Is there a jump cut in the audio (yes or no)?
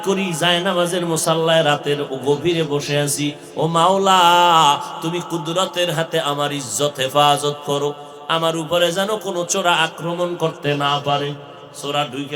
no